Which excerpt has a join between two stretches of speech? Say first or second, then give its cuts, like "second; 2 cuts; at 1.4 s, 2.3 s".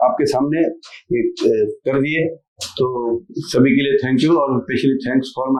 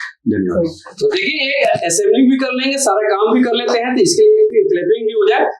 second; 1 cut; at 4.5 s